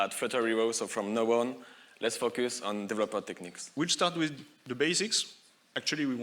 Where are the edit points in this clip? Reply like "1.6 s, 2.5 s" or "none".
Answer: 3.6 s